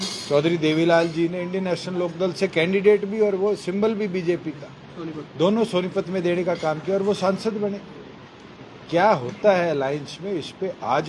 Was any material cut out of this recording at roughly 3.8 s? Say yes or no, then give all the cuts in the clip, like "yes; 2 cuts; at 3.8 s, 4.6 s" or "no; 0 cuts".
no; 0 cuts